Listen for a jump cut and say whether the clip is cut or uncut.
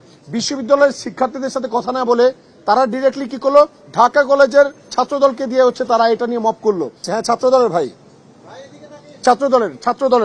cut